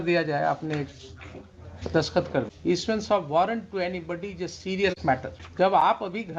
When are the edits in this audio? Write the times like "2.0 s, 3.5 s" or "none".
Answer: 2.5 s, 5.4 s